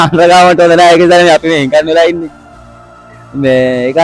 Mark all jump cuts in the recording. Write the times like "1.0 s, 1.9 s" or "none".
none